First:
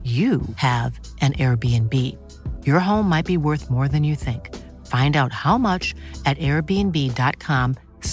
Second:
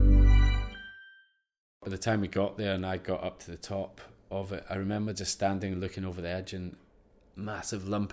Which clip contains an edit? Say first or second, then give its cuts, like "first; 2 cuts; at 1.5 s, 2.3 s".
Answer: second; 1 cut; at 1.8 s